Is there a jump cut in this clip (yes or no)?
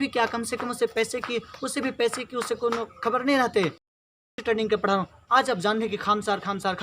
yes